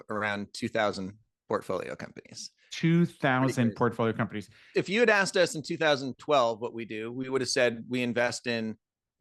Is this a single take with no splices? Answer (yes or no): no